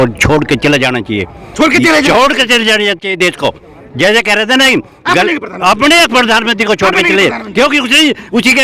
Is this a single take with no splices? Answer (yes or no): yes